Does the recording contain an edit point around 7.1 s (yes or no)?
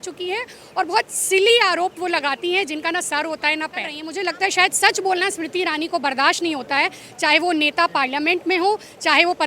no